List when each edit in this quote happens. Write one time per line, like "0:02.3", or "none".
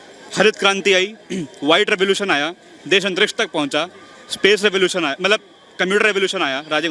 none